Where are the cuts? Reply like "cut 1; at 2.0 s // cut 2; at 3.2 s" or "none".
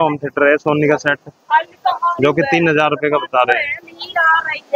none

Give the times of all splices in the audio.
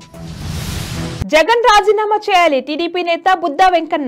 none

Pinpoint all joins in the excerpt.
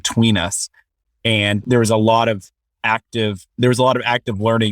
cut 1; at 3.4 s

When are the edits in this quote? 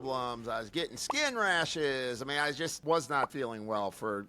cut 1; at 2.8 s // cut 2; at 3.3 s

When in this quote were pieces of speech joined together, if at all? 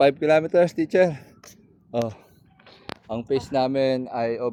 none

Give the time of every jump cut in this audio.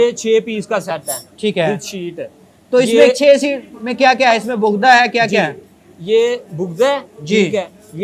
none

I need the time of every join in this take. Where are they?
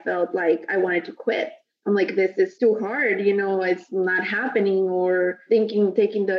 cut 1; at 2.5 s // cut 2; at 5.4 s

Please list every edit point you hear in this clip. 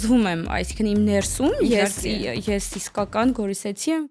none

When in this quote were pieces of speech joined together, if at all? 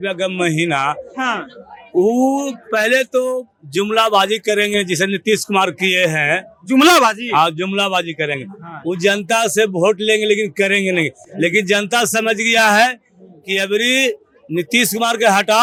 none

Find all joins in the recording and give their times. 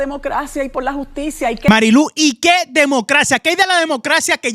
cut 1; at 1.7 s

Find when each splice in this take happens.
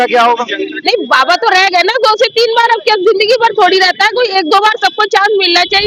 none

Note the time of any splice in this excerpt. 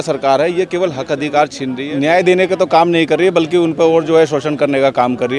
cut 1; at 1.9 s

